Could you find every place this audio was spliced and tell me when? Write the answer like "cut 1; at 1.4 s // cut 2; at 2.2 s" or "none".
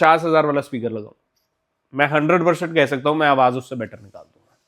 none